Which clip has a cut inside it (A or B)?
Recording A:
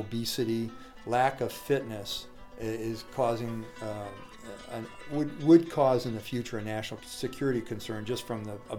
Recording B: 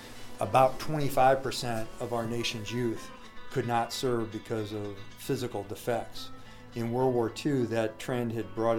A